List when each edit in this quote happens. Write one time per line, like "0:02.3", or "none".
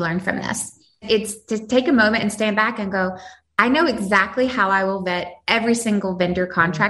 0:01.0